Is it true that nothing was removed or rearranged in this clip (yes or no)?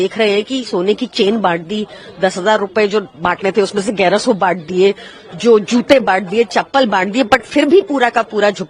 yes